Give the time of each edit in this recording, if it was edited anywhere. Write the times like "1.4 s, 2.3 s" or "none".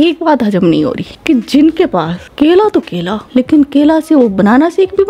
none